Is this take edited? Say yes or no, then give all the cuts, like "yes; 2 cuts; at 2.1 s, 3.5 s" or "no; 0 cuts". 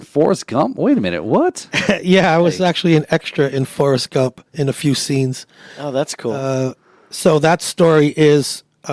no; 0 cuts